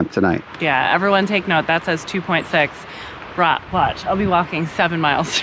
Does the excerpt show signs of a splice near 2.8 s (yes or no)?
no